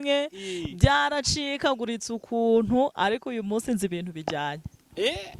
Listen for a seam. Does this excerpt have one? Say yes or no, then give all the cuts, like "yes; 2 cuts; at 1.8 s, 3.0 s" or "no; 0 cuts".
no; 0 cuts